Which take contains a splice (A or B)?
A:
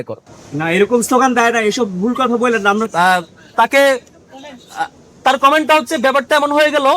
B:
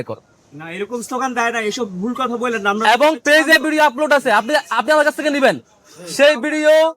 A